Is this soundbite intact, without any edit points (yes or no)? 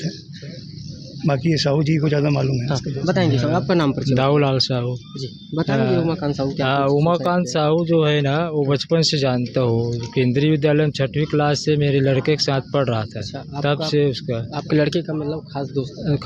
yes